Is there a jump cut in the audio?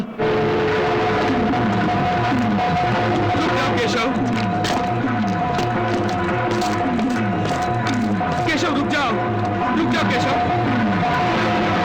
no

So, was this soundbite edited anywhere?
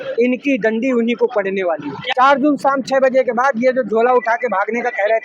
yes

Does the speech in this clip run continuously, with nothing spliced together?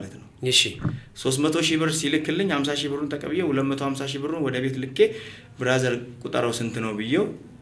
yes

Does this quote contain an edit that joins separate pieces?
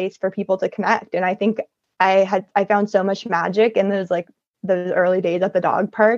no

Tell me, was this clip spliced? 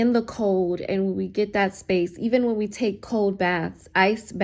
no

